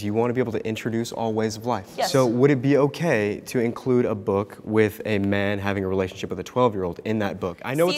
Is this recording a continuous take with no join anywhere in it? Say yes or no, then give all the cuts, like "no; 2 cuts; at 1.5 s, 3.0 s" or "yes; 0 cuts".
no; 1 cut; at 1.9 s